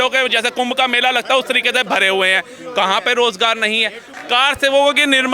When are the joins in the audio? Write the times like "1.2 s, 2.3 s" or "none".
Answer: 4.1 s